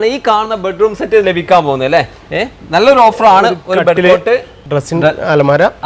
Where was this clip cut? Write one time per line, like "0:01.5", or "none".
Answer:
none